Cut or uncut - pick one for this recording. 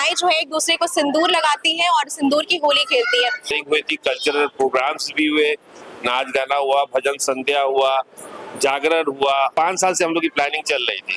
cut